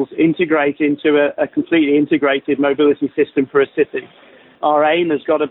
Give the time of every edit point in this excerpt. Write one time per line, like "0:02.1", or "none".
none

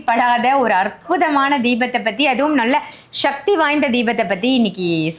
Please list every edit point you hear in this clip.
none

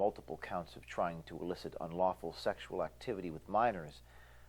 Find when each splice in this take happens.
0:01.2
0:03.0

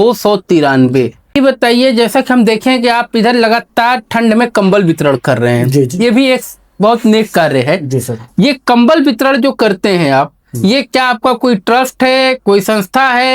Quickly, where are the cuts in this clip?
0:01.4

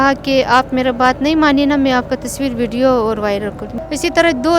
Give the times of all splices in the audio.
0:03.7

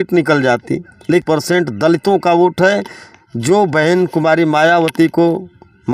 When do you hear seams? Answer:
0:01.2

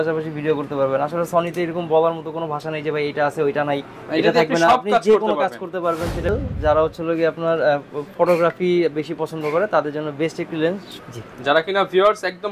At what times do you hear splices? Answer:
0:06.3
0:10.9

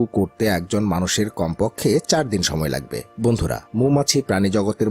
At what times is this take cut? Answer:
0:03.0

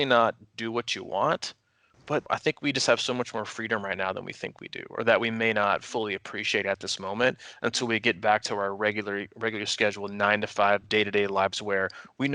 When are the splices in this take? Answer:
0:02.3

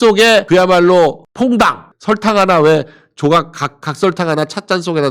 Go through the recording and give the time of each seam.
0:01.9

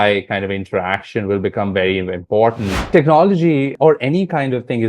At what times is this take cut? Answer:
0:02.9
0:03.7

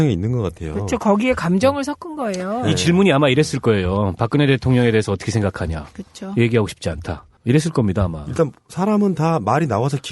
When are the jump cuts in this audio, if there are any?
0:04.3

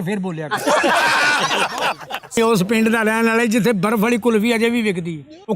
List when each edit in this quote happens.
0:02.4

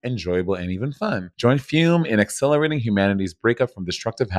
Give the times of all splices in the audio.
0:01.3

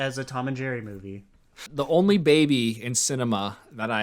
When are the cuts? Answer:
0:01.7

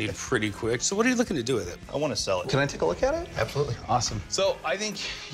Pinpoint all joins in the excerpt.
0:02.4
0:04.2

